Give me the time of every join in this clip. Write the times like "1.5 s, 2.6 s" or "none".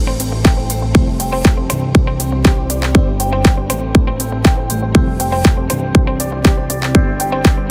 none

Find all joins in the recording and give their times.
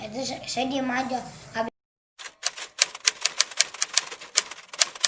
1.7 s

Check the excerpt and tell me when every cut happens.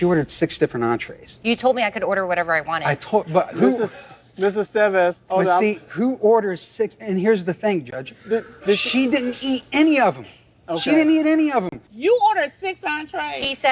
none

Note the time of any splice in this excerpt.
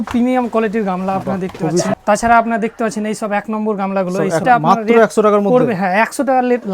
1.9 s, 4.4 s

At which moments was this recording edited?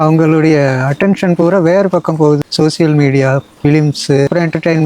2.4 s

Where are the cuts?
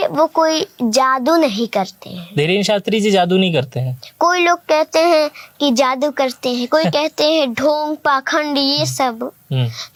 none

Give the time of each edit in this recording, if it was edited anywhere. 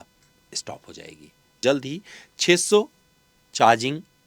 1.6 s

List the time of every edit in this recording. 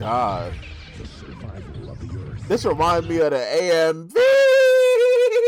none

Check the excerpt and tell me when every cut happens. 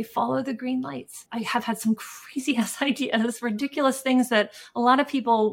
1.2 s

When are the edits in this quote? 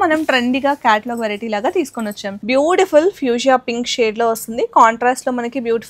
2.3 s

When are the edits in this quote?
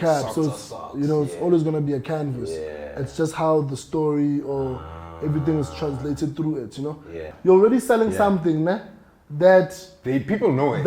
7.3 s

